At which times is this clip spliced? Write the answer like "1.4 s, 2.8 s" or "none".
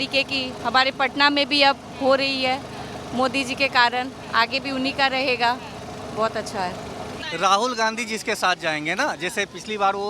7.2 s